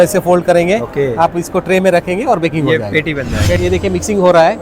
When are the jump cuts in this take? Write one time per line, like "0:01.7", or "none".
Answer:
0:03.6